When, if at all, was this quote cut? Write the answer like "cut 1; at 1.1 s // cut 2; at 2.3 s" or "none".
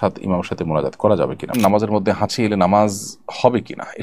cut 1; at 1.5 s